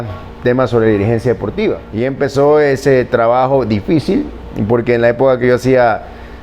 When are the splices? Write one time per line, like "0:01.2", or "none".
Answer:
0:01.9

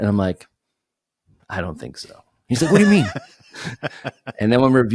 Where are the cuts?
none

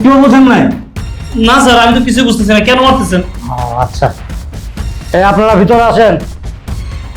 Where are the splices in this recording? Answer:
0:06.2

